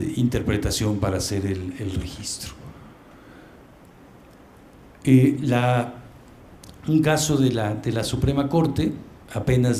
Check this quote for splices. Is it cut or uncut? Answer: uncut